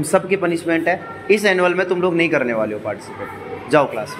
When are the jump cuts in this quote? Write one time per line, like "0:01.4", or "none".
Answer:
none